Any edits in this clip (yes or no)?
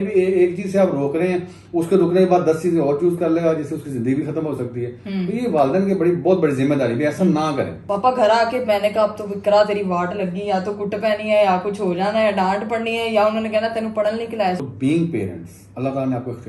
yes